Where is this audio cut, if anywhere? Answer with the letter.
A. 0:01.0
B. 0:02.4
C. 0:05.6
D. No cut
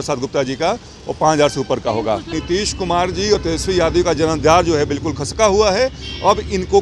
B